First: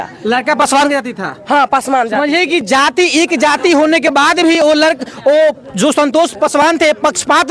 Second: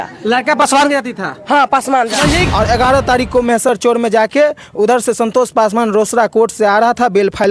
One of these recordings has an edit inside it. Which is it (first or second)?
second